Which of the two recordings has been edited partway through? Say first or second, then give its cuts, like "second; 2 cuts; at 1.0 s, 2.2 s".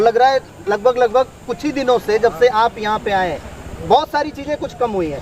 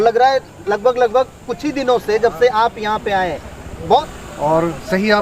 second; 1 cut; at 4.1 s